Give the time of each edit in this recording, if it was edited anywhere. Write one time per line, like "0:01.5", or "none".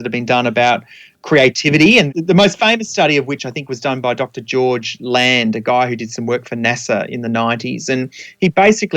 0:02.1